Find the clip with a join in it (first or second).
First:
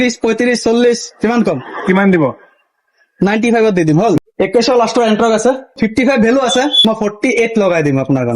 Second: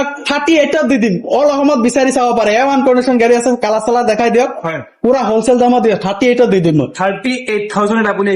first